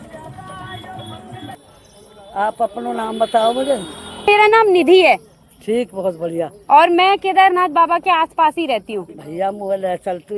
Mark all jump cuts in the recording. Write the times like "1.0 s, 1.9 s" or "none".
1.5 s, 4.3 s